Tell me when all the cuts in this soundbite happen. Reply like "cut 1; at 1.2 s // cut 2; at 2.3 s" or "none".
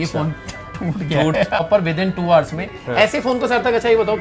cut 1; at 1.6 s